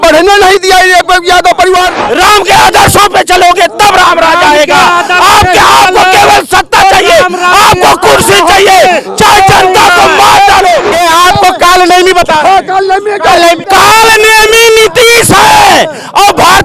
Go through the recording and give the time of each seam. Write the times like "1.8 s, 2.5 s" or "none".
1.9 s, 10.9 s, 13.6 s